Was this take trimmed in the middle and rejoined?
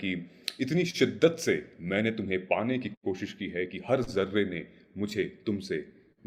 no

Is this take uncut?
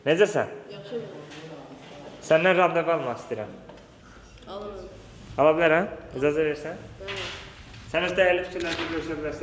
yes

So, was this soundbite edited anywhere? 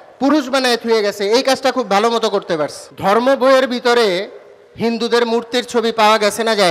yes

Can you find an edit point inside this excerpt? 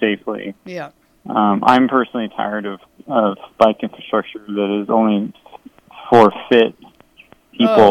no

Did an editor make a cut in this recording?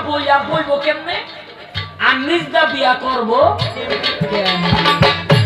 no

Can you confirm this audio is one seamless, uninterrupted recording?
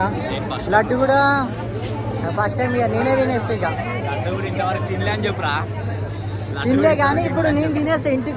yes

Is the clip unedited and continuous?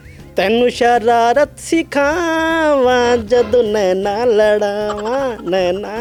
yes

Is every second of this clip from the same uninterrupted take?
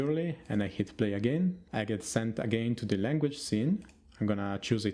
no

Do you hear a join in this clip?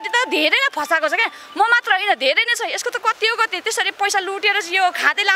no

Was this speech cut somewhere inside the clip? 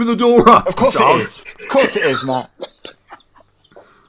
no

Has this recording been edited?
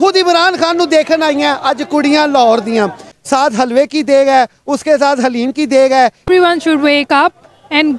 yes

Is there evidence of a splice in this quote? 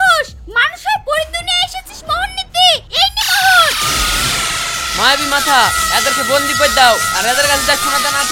no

